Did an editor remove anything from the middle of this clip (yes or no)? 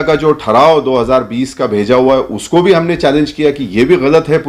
no